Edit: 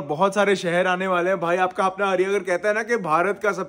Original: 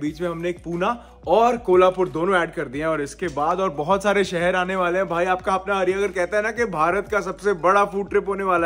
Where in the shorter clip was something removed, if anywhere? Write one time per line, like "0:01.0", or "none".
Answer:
none